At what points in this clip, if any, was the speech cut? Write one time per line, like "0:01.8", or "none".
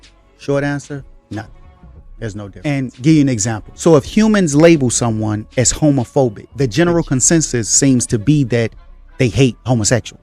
0:02.5